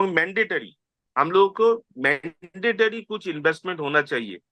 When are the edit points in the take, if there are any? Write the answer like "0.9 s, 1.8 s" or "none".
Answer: 1.0 s